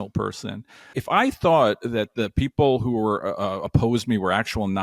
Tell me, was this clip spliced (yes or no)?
yes